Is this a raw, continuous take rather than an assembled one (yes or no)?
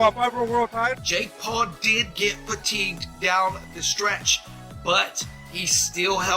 no